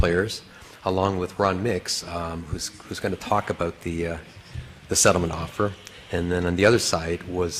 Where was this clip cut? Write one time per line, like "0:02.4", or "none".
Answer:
0:01.7